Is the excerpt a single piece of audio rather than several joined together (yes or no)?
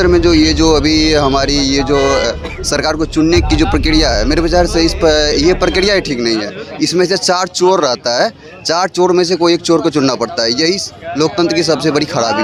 yes